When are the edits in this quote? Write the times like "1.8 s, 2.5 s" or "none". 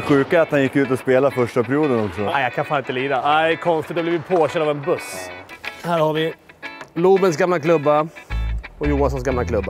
2.3 s, 5.1 s